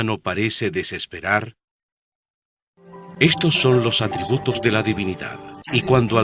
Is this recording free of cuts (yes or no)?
yes